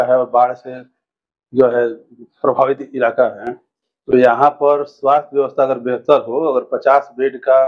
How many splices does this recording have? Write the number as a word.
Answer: zero